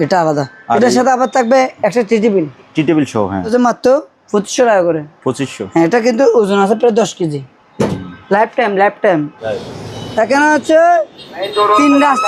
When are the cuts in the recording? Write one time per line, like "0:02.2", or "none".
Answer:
0:03.5
0:09.4

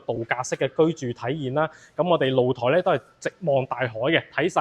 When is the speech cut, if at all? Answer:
none

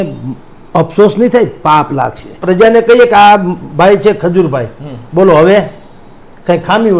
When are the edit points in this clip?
0:02.4

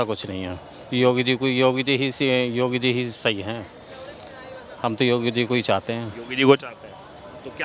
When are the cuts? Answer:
none

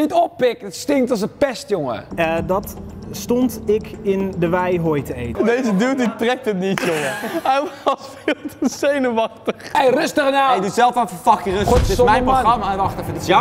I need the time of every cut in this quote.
0:02.1
0:05.3
0:09.6

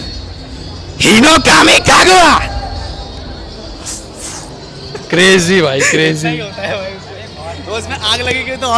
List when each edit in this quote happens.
none

